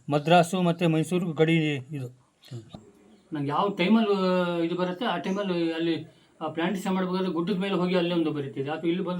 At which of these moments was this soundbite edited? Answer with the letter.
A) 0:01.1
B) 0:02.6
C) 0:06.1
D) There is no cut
B